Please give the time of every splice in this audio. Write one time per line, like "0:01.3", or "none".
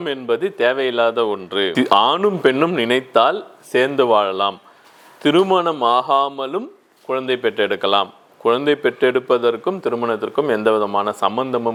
none